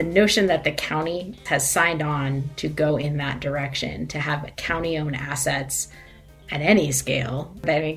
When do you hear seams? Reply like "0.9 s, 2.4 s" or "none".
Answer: 1.3 s